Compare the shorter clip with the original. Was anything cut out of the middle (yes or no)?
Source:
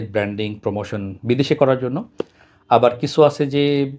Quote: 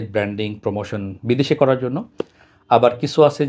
no